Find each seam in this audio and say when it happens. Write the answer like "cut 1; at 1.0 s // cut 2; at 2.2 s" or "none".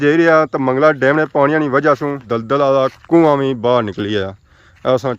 cut 1; at 2.3 s

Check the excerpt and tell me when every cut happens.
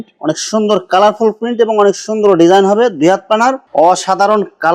cut 1; at 3.6 s

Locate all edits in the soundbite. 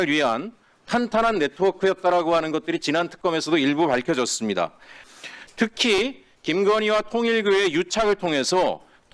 cut 1; at 5.0 s

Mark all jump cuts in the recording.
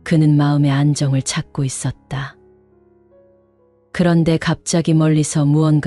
cut 1; at 2.5 s // cut 2; at 3.9 s

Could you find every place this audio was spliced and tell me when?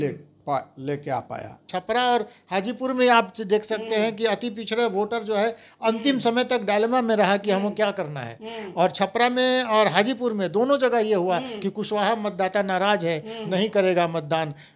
cut 1; at 1.7 s

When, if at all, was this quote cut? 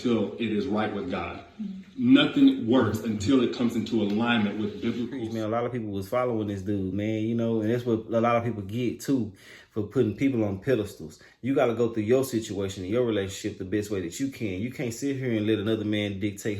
cut 1; at 5.1 s

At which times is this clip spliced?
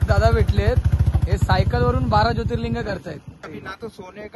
cut 1; at 3.5 s

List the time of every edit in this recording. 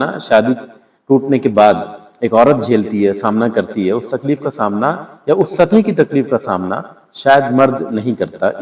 none

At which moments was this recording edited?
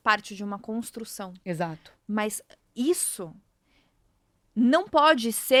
none

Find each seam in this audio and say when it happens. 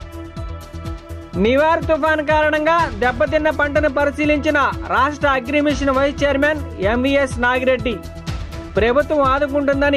cut 1; at 0.9 s

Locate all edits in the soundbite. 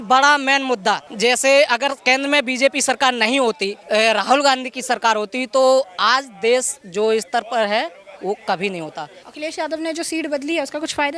cut 1; at 1.1 s // cut 2; at 3.7 s // cut 3; at 9.2 s

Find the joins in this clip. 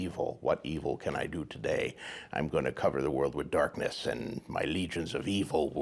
none

